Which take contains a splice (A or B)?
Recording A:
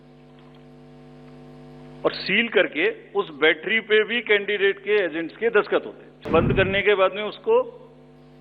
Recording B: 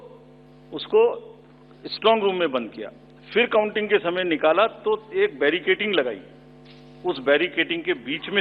A